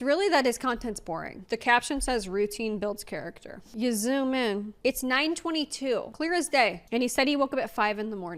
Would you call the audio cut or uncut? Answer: cut